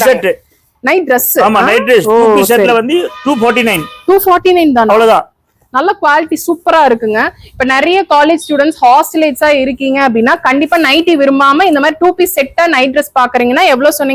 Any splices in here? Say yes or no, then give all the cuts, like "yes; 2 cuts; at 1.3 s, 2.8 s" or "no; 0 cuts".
no; 0 cuts